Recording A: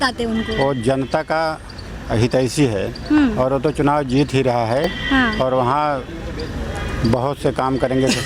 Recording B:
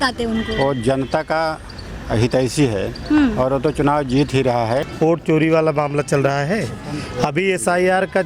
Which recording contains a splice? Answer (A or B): B